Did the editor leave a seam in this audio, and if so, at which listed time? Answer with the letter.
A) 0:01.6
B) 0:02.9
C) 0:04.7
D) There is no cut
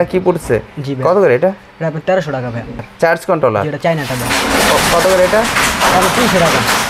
B